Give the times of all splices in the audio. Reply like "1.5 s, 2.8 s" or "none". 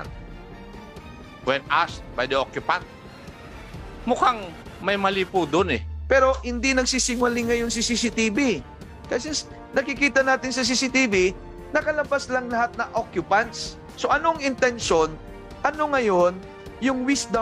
5.9 s